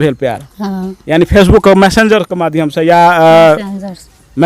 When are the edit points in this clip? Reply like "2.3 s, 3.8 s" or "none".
1.3 s

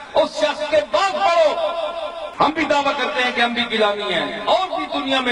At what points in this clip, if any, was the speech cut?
2.2 s

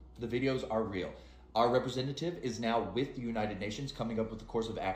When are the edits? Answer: none

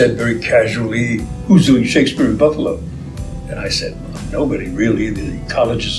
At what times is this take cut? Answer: 1.3 s

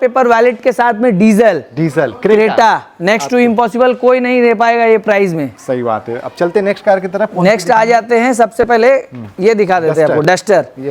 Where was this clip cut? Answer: none

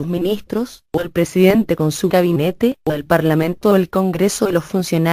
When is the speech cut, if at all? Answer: 3.1 s

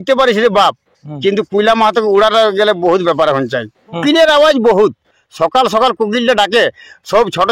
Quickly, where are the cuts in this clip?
4.0 s

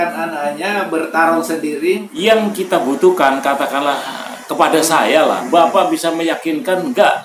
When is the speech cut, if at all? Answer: 2.1 s

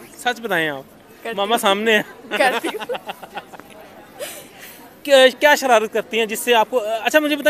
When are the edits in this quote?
none

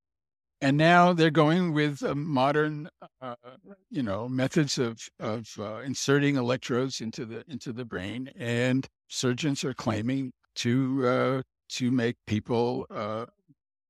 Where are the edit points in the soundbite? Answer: 9.0 s, 10.4 s

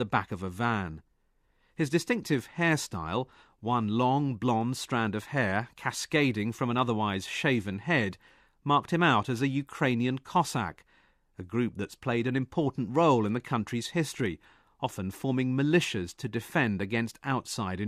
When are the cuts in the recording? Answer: none

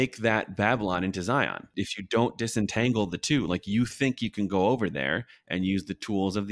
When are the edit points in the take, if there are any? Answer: 1.7 s

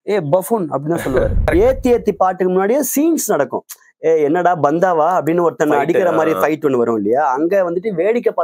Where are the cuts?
1.4 s

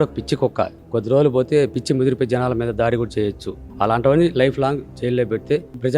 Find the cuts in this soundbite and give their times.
3.6 s

